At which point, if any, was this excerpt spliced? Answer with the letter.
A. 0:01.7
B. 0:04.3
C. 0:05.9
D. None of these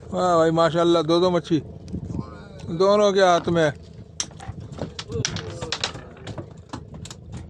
D